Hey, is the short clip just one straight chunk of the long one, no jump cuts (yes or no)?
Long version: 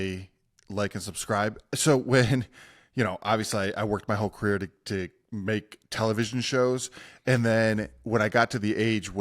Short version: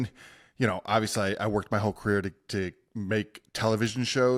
yes